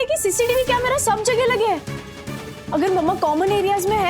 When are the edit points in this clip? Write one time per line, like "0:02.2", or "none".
none